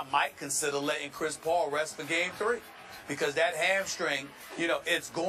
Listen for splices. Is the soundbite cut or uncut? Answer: uncut